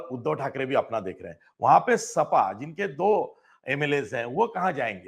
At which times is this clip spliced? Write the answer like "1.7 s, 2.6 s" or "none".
none